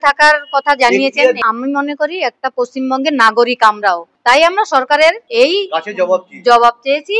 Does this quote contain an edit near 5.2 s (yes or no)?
yes